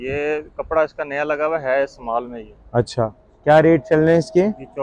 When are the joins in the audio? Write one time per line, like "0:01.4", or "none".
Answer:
none